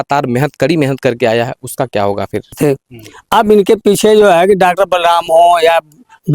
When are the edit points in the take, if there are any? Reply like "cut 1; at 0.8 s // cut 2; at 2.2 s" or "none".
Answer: cut 1; at 2.5 s